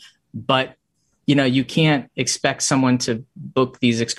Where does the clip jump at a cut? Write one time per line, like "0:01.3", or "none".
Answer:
none